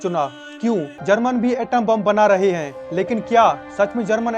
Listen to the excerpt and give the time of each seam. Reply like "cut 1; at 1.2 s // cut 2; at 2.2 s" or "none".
cut 1; at 0.9 s